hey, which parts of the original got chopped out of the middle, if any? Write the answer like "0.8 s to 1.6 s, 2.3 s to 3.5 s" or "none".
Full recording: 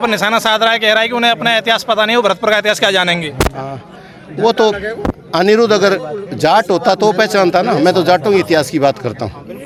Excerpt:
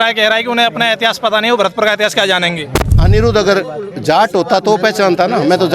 3.6 s to 5.3 s